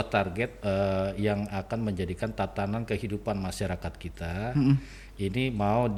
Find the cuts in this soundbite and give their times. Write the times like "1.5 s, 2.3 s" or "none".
none

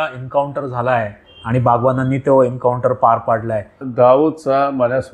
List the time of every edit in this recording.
3.8 s

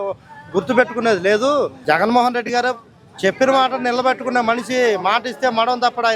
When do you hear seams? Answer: 1.8 s

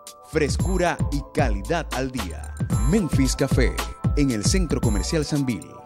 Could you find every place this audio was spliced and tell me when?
none

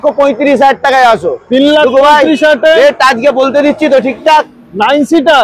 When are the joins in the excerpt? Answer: none

